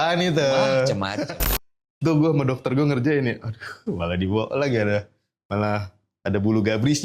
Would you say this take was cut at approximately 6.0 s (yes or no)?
no